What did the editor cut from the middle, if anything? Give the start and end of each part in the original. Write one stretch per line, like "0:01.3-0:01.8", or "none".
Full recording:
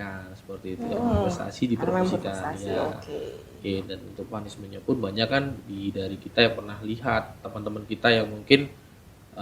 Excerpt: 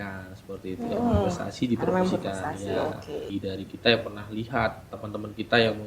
0:03.3-0:05.8